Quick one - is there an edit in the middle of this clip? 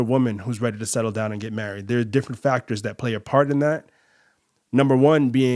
no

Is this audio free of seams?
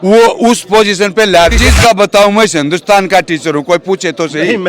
no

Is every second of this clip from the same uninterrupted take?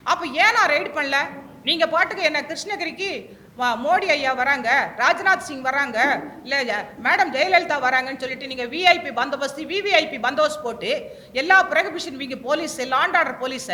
yes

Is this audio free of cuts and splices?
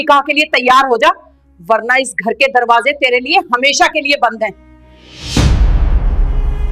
yes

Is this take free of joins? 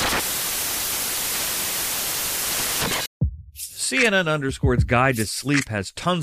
no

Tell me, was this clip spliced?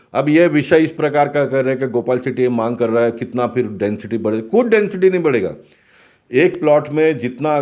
no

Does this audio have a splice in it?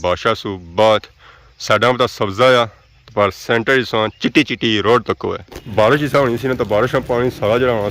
yes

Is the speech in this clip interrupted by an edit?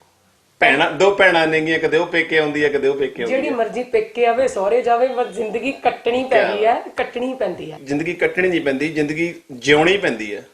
yes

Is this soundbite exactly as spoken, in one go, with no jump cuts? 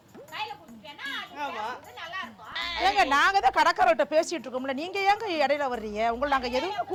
yes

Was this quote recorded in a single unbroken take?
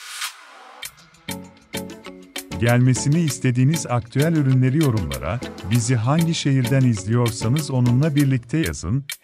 no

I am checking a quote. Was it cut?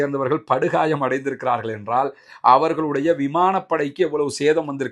no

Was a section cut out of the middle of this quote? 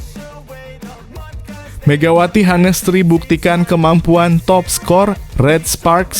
yes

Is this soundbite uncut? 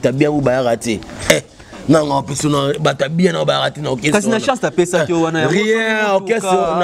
yes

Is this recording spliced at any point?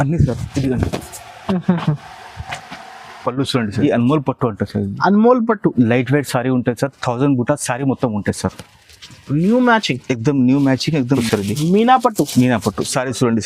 yes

